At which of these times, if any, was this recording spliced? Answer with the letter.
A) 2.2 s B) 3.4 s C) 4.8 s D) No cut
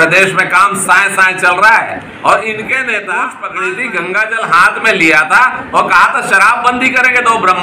B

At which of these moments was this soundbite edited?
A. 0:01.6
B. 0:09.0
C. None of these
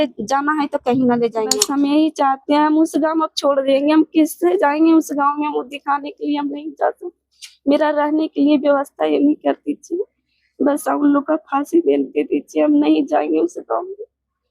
A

